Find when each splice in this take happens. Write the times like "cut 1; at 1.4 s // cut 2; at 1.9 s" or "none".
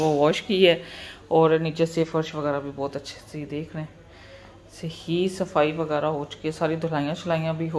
none